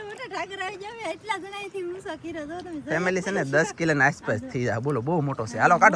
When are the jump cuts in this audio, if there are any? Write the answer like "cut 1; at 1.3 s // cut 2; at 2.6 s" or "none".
none